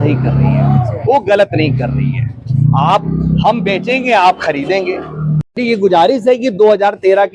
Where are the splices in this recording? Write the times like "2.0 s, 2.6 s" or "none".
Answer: 5.5 s

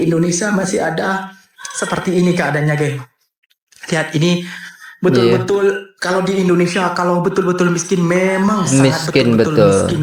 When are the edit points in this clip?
none

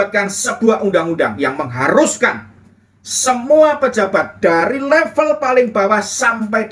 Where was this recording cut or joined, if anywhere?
none

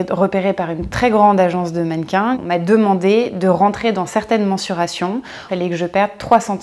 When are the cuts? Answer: 2.4 s, 5.5 s

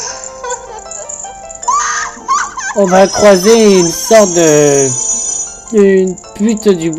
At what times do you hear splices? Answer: 4.9 s

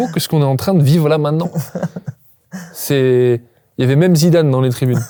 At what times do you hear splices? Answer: none

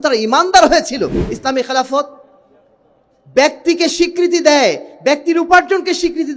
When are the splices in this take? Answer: 1.3 s

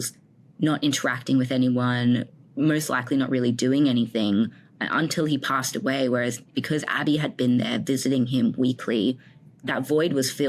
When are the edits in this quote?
6.4 s, 9.6 s

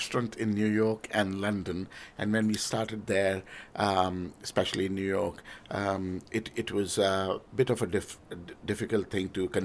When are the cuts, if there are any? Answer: none

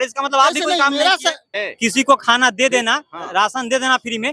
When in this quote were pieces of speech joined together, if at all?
1.4 s

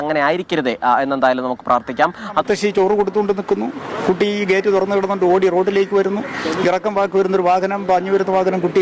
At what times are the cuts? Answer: 2.4 s

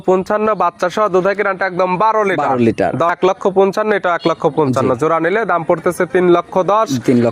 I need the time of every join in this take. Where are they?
3.1 s

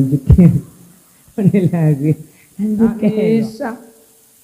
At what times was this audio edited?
3.4 s

